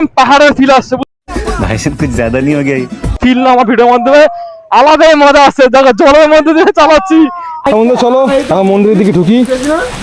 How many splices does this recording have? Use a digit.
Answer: 3